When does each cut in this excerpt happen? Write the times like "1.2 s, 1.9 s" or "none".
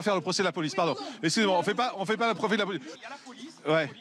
3.0 s